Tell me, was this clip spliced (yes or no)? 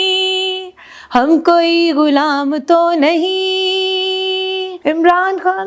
yes